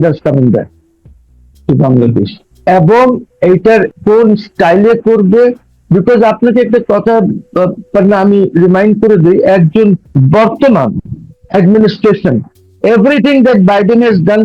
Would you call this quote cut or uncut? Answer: cut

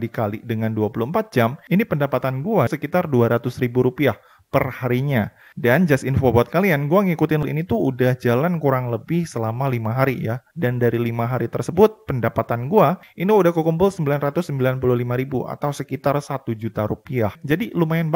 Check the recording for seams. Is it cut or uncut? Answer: cut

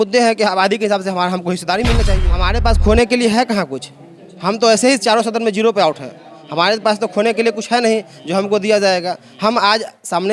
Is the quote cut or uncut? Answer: cut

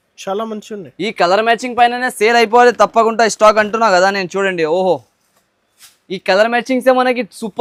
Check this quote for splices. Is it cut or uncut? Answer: uncut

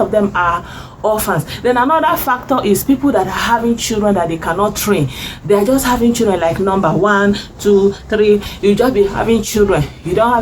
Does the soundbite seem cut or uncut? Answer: cut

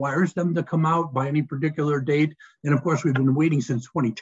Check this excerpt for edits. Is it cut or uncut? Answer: uncut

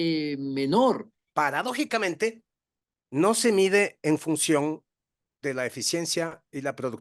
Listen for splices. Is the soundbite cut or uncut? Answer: cut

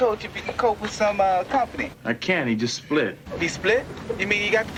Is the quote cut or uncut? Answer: uncut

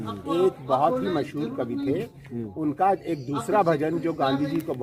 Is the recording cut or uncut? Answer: uncut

